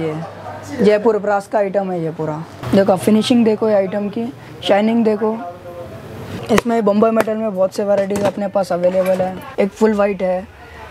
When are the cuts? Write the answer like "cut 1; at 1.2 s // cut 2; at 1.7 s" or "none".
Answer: cut 1; at 2.6 s // cut 2; at 6.4 s // cut 3; at 9.4 s